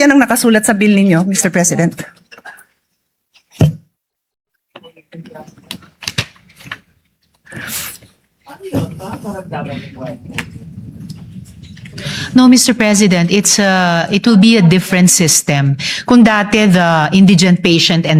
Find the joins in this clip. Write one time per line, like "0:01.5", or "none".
none